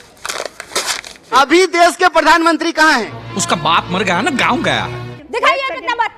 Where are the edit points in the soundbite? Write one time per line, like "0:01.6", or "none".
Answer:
0:01.2
0:05.1